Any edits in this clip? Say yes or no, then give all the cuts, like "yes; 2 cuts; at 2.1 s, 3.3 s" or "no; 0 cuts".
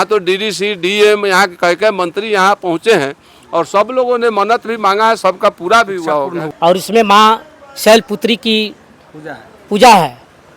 yes; 1 cut; at 6.4 s